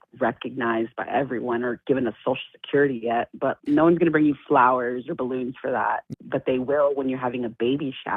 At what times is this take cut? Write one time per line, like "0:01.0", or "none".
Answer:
none